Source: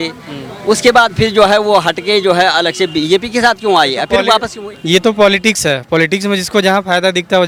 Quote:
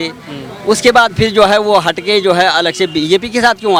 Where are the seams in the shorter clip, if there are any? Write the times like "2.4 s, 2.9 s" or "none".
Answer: none